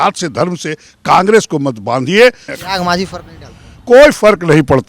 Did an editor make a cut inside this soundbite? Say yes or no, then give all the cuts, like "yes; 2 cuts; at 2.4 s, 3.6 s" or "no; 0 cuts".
yes; 1 cut; at 2.5 s